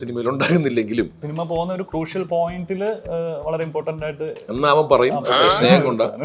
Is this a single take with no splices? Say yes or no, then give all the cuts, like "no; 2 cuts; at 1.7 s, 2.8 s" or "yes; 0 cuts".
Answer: no; 1 cut; at 1.3 s